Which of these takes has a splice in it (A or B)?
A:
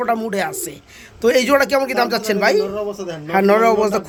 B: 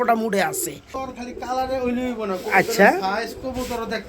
B